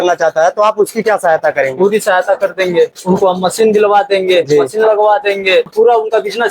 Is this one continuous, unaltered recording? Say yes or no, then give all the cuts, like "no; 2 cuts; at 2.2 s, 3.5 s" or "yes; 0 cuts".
no; 2 cuts; at 3.0 s, 5.7 s